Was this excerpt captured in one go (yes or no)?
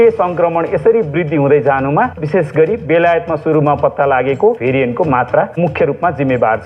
no